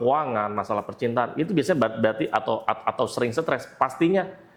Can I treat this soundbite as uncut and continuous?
yes; 0 cuts

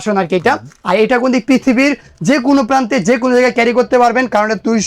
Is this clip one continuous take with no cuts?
yes; 0 cuts

